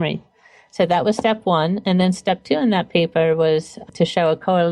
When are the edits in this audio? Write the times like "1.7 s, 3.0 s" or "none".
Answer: 3.8 s

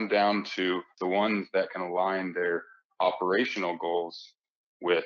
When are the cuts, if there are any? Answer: 0.9 s

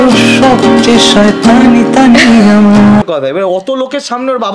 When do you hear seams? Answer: 3.0 s

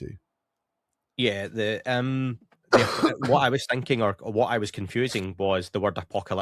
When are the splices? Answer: none

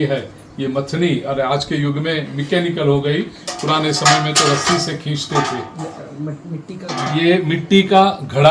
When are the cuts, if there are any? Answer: none

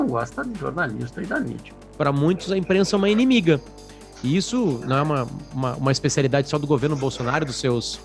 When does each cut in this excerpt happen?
1.8 s

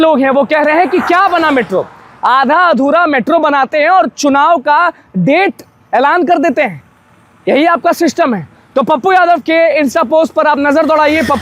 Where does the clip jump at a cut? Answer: none

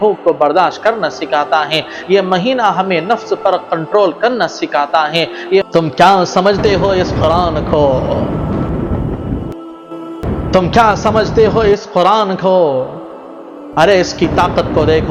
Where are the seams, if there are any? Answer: 5.7 s

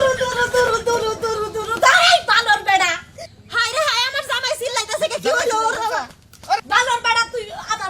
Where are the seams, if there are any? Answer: 6.6 s

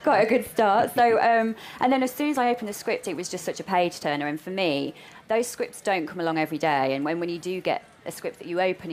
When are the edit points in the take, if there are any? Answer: none

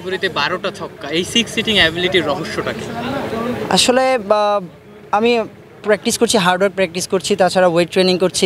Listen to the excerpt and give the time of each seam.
none

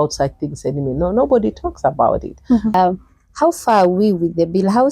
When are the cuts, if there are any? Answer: 2.7 s

